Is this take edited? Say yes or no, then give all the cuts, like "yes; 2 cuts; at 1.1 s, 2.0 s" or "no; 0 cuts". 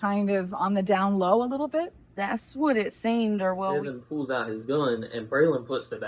yes; 1 cut; at 3.9 s